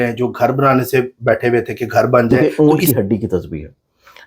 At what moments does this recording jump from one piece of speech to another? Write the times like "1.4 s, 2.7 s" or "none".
2.5 s

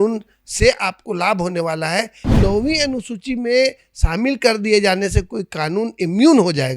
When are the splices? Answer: 2.3 s

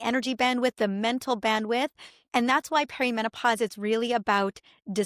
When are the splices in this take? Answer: none

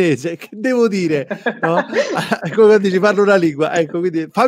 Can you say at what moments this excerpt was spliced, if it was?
none

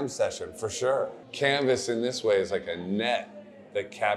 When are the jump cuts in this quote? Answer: 1.2 s

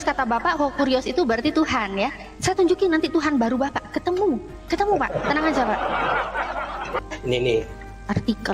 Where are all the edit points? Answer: 7.0 s

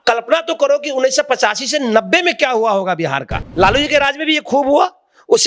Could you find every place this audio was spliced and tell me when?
3.4 s

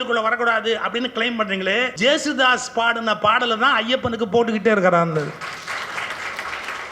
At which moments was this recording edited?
1.9 s

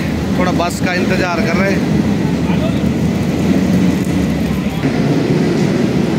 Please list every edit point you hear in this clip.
none

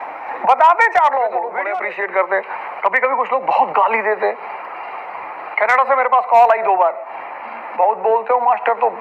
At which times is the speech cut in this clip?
1.6 s

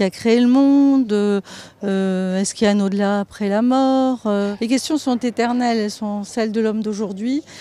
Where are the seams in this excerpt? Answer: 3.4 s

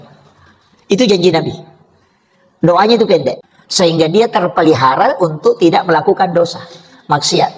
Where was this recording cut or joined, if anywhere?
3.4 s

